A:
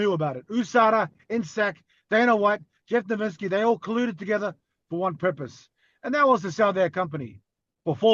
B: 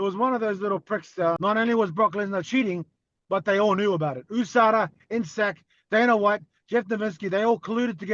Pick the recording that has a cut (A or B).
B